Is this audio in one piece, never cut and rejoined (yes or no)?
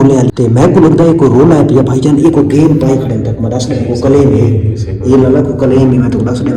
yes